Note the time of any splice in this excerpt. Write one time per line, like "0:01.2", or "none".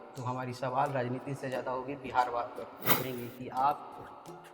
0:03.0